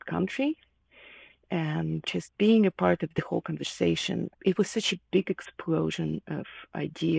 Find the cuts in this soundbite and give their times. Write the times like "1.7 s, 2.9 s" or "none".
2.0 s, 4.3 s